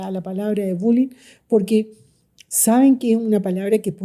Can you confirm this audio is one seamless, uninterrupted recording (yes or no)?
yes